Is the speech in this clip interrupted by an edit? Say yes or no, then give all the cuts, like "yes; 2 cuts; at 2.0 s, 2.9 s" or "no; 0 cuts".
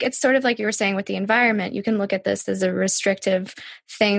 no; 0 cuts